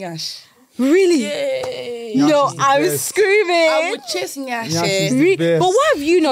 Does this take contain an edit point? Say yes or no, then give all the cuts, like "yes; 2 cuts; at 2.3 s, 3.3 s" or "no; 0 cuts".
no; 0 cuts